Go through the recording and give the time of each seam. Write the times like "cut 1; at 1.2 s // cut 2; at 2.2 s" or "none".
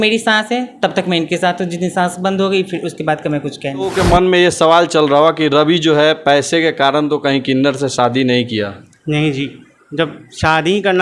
cut 1; at 3.9 s